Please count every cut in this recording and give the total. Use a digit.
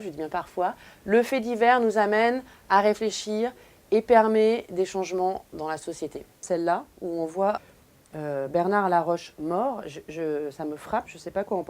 1